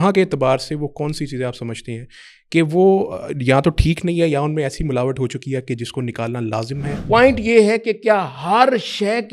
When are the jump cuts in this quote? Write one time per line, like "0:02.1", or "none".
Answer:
0:07.0